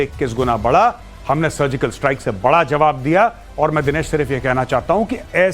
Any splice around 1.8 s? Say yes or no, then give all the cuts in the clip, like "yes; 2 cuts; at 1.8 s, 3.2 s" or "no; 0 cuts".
no; 1 cut; at 3.4 s